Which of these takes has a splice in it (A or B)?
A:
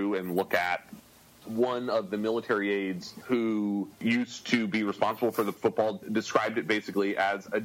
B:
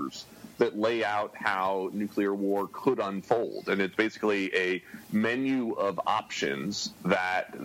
A